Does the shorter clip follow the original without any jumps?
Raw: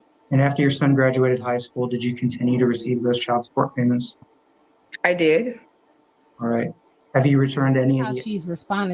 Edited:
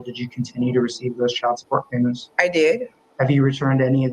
no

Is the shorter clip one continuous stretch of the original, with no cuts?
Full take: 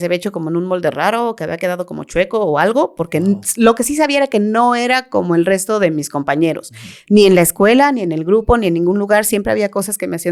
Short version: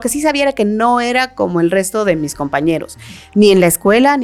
yes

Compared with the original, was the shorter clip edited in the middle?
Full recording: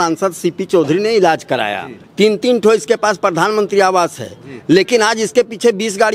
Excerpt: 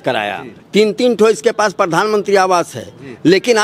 no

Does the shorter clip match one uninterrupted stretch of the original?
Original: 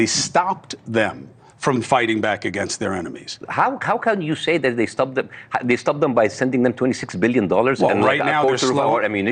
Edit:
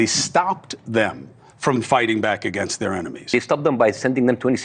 no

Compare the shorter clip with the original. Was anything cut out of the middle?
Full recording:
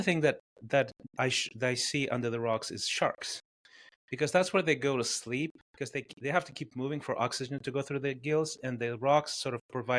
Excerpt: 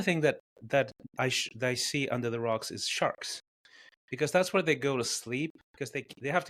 no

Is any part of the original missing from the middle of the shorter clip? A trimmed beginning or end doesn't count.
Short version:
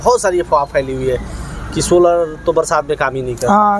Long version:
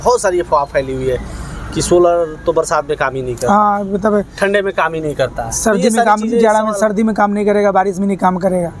no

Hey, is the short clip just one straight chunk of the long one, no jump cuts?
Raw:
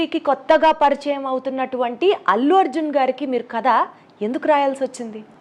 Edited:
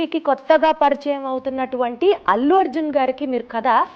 yes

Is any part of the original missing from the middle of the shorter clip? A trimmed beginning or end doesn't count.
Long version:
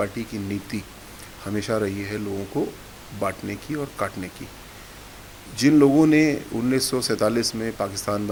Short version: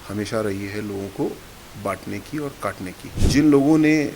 yes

